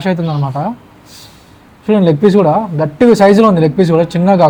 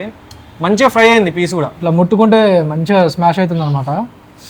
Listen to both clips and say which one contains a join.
second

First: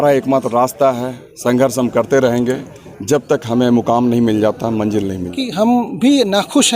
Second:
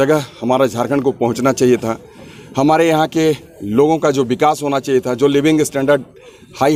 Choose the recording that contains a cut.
first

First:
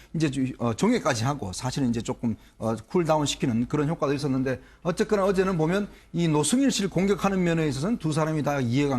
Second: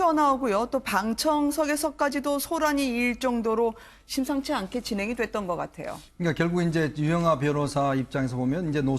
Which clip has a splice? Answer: first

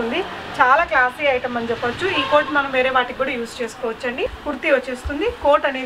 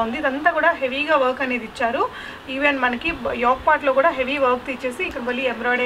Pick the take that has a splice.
first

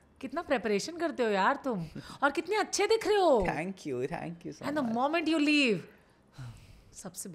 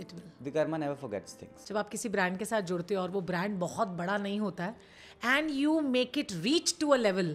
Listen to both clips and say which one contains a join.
second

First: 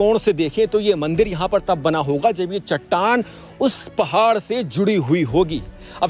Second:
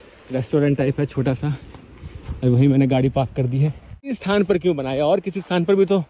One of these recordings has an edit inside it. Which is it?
second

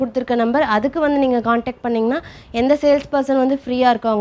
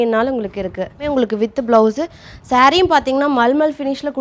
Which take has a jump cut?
second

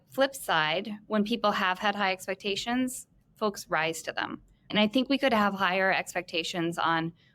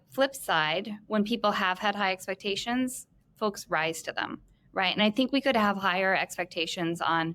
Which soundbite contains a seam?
first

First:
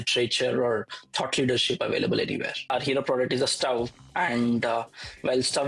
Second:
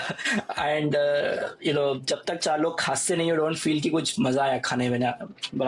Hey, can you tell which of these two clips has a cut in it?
first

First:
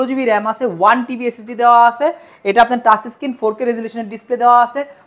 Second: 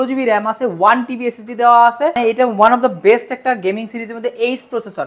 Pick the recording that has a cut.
second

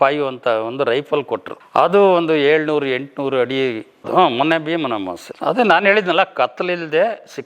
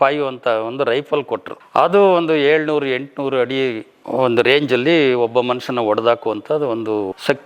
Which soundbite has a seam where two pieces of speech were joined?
first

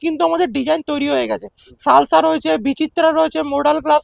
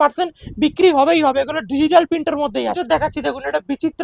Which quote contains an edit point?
second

